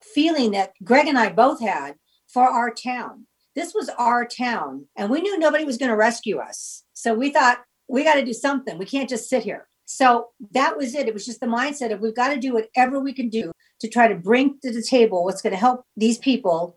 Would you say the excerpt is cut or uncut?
cut